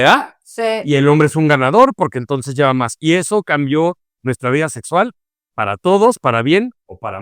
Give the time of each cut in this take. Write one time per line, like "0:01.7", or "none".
none